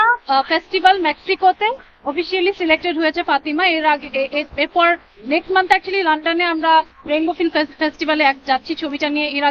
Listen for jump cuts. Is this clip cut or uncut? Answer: uncut